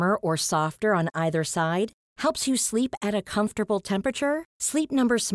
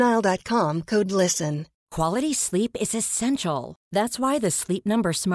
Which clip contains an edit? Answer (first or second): second